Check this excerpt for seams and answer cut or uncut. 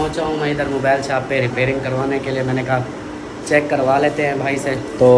uncut